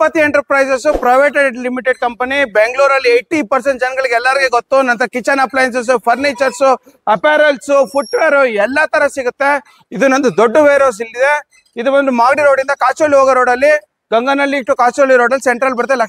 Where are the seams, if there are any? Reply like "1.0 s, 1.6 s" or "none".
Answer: none